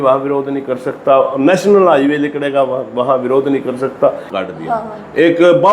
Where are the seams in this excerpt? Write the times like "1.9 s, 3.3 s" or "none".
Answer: 4.3 s